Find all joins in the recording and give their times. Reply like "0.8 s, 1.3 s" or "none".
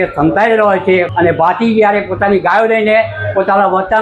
1.1 s